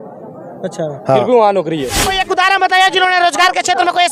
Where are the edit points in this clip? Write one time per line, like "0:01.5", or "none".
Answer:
0:02.1